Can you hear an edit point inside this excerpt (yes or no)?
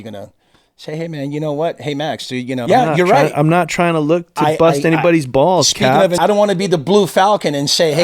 yes